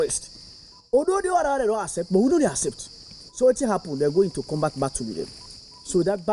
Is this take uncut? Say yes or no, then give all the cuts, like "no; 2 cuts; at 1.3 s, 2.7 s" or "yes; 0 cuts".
no; 2 cuts; at 4.4 s, 5.4 s